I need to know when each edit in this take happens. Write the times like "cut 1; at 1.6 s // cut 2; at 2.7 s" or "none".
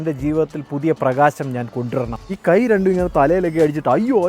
cut 1; at 2.2 s